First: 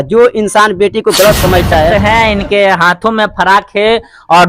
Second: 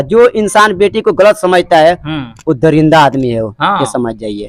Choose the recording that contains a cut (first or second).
first